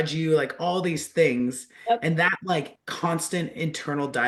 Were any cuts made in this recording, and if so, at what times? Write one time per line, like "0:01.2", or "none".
none